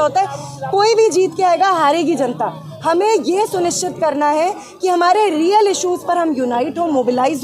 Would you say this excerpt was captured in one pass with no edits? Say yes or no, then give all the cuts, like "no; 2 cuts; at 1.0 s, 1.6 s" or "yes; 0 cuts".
yes; 0 cuts